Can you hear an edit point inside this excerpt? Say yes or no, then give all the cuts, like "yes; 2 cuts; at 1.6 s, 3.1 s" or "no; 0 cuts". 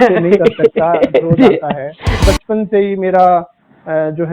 yes; 1 cut; at 2.2 s